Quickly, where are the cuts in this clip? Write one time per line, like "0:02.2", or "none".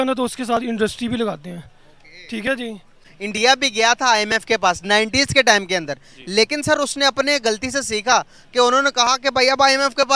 0:03.1